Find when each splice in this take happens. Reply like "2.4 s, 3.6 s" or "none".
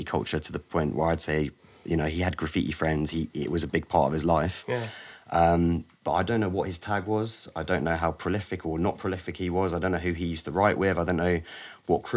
none